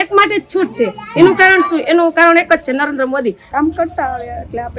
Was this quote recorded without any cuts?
no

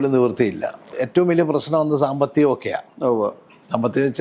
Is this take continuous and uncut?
no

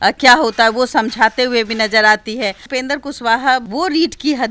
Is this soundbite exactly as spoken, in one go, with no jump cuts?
no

